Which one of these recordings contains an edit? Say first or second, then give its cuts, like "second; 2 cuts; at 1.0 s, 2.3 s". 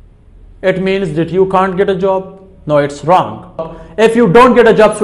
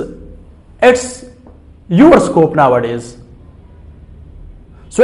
first; 1 cut; at 3.8 s